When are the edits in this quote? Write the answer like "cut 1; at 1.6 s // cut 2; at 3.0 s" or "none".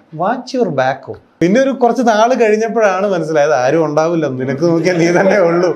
cut 1; at 1.2 s

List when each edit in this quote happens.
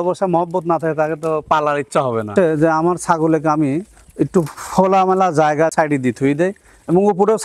cut 1; at 2.3 s // cut 2; at 5.7 s

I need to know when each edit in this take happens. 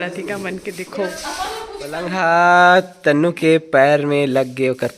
cut 1; at 2.1 s

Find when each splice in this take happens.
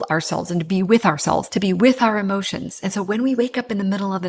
cut 1; at 1.5 s

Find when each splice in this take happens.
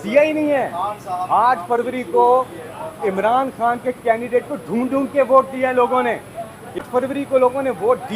cut 1; at 6.9 s

